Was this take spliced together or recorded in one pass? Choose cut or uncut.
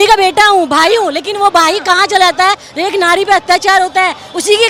uncut